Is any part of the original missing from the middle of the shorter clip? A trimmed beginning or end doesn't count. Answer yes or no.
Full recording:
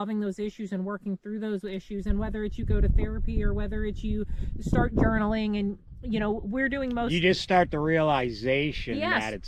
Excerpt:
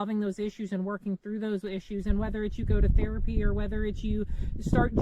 no